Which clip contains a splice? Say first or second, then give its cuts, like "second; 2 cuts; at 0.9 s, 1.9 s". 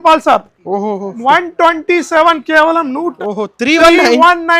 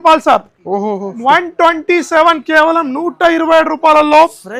first; 1 cut; at 3.1 s